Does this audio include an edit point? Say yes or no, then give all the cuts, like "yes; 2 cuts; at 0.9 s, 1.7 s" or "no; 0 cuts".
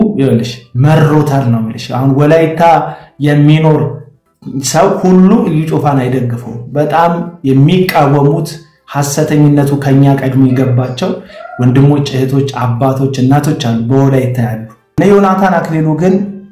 yes; 1 cut; at 15.0 s